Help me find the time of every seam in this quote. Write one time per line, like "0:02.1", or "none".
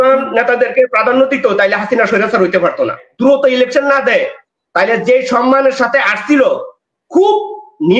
0:03.0